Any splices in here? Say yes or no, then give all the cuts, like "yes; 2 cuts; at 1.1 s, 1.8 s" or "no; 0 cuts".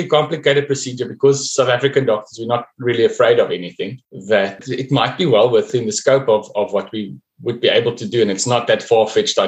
yes; 2 cuts; at 4.3 s, 5.7 s